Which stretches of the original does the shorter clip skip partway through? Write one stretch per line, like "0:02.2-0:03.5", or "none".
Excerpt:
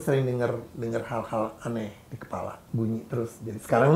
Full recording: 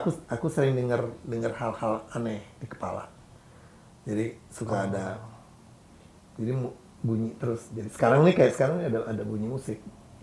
0:03.1-0:06.9